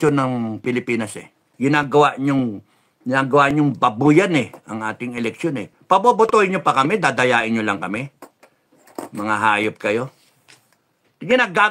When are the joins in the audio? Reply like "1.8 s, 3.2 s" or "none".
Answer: 1.4 s